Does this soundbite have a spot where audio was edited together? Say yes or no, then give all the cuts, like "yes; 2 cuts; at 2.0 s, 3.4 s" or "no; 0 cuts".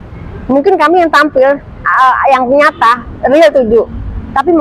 no; 0 cuts